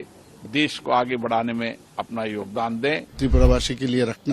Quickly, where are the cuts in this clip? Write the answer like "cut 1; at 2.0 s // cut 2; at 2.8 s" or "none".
cut 1; at 3.1 s